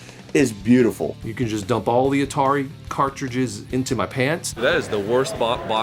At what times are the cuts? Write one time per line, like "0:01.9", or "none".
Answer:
0:01.1
0:04.6